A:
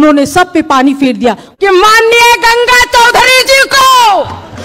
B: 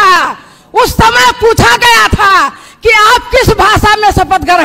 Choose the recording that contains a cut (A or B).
A